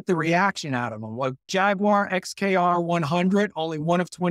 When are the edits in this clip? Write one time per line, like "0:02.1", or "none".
0:01.5